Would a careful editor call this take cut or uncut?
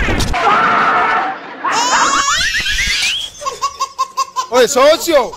cut